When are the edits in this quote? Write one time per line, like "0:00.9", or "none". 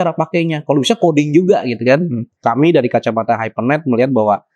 0:02.3